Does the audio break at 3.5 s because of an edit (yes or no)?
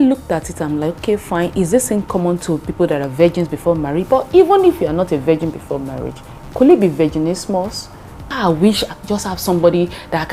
no